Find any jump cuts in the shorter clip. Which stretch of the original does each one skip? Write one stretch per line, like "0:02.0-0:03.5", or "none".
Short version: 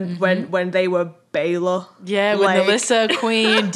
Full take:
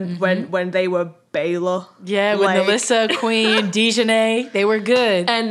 none

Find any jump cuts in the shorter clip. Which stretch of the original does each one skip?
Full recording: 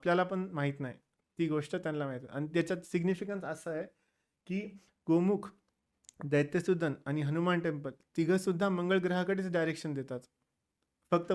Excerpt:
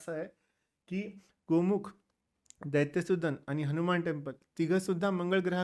none

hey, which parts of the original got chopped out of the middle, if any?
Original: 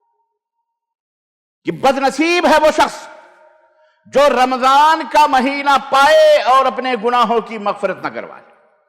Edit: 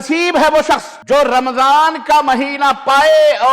0:03.0-0:04.0

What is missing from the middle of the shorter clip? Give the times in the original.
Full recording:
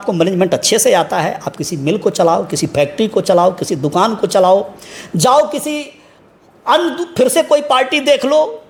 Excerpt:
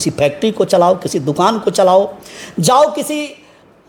none

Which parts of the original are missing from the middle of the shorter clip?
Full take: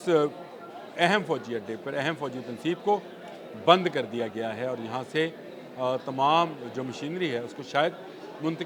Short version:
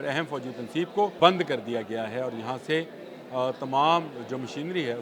0:03.0-0:03.6

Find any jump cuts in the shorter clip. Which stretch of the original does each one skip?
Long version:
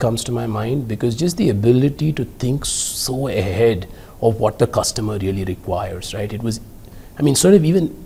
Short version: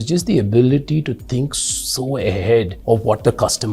0:03.9-0:04.1

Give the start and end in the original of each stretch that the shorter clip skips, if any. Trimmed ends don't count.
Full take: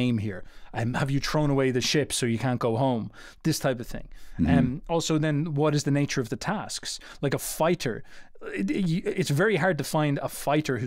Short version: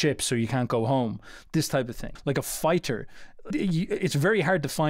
0:04.0-0:07.0
0:08.5-0:08.7

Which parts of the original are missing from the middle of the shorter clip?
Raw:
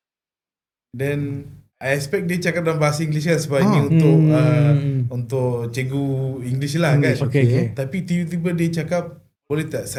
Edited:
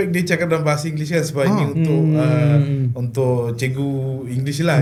none

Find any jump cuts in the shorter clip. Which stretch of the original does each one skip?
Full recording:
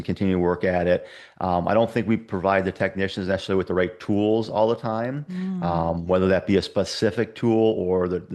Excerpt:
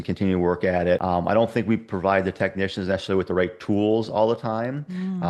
0:01.0-0:01.4

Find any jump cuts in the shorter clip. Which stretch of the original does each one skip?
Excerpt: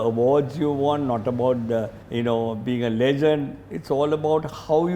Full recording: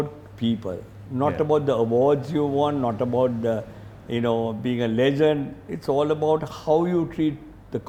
0:03.7-0:04.0

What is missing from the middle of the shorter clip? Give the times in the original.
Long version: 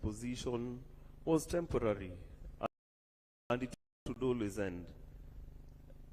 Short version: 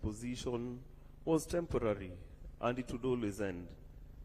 0:03.0-0:04.2

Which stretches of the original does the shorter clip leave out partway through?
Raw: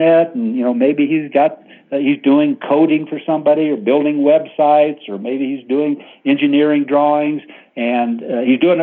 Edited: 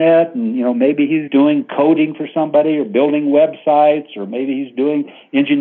0:01.3-0:02.2

